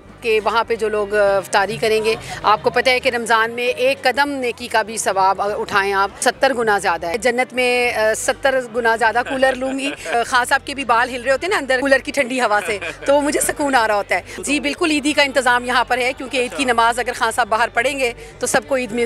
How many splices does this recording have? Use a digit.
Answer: 5